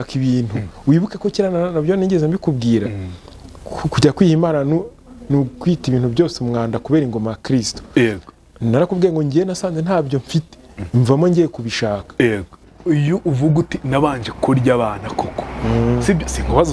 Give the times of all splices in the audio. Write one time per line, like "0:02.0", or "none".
0:12.7